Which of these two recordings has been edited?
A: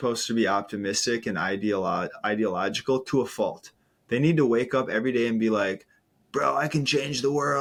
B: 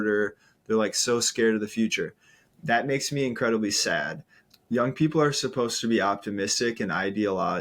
B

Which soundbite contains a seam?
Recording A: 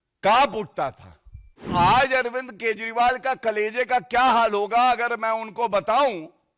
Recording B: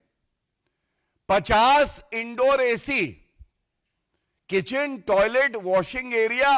A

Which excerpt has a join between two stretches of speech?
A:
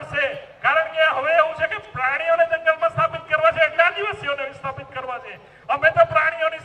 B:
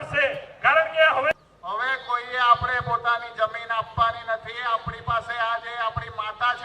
B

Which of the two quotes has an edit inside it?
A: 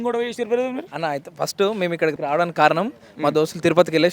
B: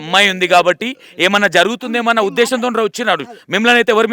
A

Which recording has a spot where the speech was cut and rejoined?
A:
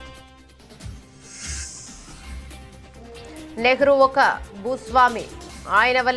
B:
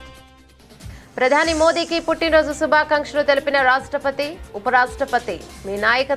B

